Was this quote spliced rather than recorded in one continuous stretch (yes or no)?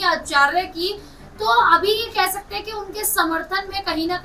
no